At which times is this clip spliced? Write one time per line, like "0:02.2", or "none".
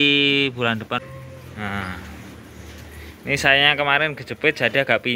0:01.0